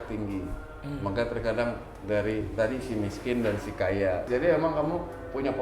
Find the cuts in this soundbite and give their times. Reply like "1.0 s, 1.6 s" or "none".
4.2 s